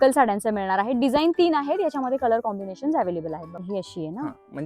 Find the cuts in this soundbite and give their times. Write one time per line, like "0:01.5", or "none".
0:03.5